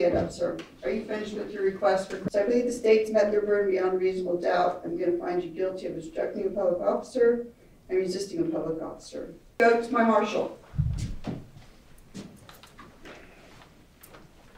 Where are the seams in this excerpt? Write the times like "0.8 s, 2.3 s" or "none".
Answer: 2.2 s, 9.6 s